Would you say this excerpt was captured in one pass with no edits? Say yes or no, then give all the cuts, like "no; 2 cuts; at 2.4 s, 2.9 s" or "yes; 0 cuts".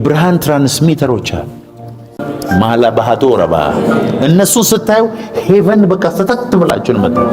no; 1 cut; at 2.2 s